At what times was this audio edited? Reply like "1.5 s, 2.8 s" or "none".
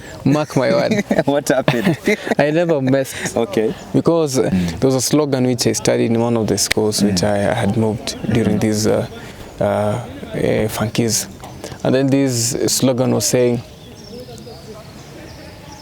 4.5 s